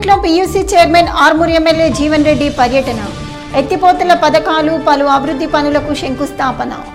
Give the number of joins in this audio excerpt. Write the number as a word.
zero